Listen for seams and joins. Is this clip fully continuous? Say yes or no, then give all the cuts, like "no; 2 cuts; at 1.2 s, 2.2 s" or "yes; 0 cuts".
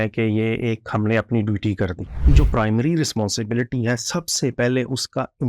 no; 1 cut; at 2.2 s